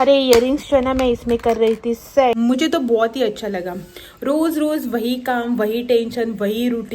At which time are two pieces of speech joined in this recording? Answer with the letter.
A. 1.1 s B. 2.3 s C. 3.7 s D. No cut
B